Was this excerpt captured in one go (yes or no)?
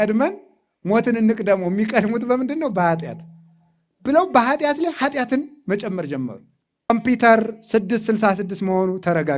no